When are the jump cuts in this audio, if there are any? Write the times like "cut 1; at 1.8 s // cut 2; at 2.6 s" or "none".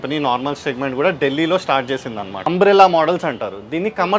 cut 1; at 2.4 s